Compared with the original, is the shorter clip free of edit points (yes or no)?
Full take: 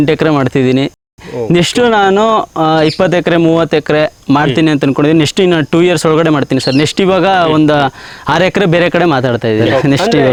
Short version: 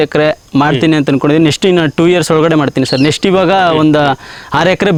yes